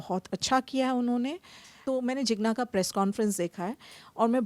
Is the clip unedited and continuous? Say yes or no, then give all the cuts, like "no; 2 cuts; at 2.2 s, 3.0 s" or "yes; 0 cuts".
no; 1 cut; at 1.8 s